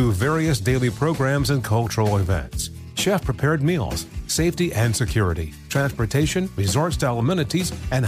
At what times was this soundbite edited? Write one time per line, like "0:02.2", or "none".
none